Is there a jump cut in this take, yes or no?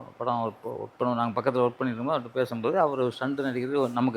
no